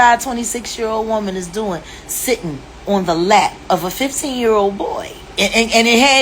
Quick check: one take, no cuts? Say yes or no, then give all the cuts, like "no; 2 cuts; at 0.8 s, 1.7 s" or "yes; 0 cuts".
yes; 0 cuts